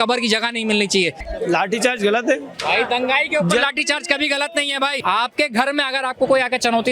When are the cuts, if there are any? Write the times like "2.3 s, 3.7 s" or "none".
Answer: 1.2 s, 2.5 s, 5.0 s